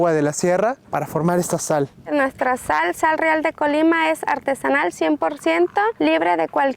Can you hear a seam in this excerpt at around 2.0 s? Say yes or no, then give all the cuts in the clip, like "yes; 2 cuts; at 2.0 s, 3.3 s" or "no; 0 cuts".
yes; 1 cut; at 2.0 s